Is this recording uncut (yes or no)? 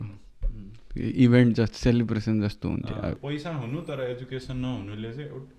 no